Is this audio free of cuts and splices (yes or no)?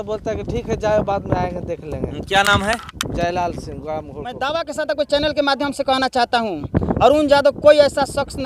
no